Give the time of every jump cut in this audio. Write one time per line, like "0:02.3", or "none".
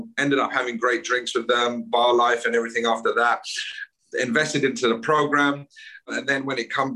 0:06.1